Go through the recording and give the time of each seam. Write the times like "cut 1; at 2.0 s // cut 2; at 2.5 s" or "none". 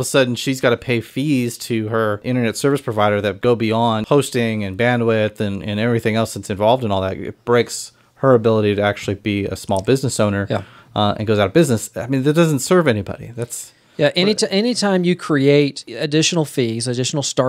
cut 1; at 2.2 s // cut 2; at 3.4 s // cut 3; at 15.9 s

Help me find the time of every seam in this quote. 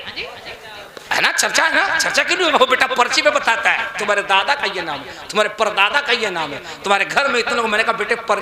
none

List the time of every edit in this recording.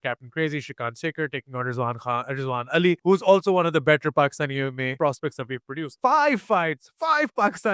cut 1; at 3.0 s // cut 2; at 4.9 s // cut 3; at 5.8 s

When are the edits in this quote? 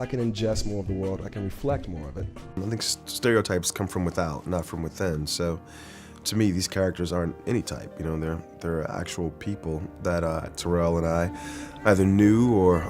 cut 1; at 2.4 s

